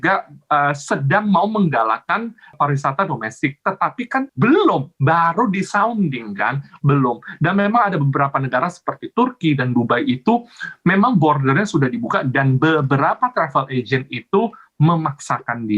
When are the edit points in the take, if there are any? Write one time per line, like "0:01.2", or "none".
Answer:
0:02.5
0:04.3